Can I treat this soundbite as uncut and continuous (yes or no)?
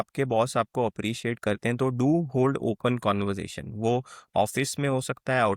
yes